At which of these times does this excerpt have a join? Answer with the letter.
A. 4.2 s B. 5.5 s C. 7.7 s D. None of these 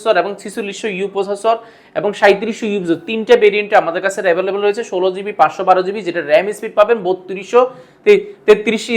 D